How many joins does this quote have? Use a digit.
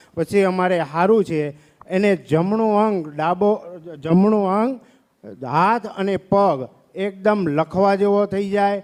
0